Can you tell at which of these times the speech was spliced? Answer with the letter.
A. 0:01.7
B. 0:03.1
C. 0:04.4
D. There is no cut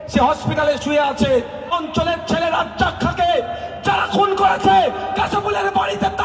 A